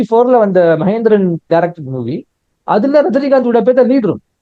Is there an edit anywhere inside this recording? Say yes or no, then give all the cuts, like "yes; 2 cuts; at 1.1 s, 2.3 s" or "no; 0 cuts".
no; 0 cuts